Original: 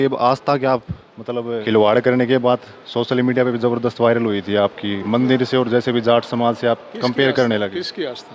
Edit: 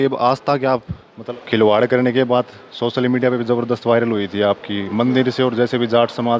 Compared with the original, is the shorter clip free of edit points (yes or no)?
no